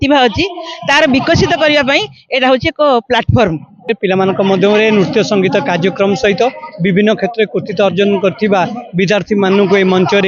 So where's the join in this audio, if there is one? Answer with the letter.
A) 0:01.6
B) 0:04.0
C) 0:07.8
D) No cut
B